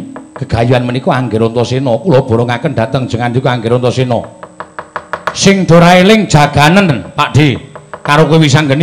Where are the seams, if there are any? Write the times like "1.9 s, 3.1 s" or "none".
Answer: none